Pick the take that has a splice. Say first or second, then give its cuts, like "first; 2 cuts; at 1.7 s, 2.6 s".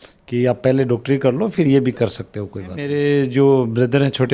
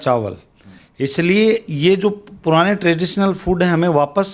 first; 1 cut; at 2.9 s